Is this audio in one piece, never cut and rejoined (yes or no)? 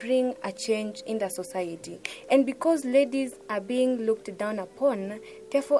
yes